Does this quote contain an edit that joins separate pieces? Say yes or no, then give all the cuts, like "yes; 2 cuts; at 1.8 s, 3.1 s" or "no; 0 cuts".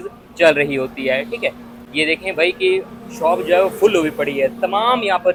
no; 0 cuts